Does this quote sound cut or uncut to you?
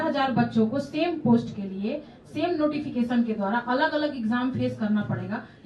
uncut